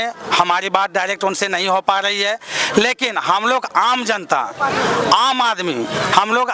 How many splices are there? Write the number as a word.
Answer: zero